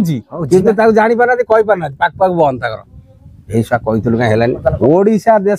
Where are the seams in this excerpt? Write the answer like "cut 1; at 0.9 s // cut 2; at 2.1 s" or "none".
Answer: cut 1; at 4.6 s